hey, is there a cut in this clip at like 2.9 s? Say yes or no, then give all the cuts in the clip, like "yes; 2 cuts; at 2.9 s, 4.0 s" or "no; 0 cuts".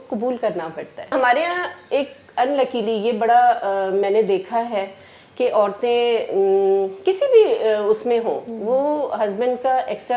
no; 1 cut; at 1.1 s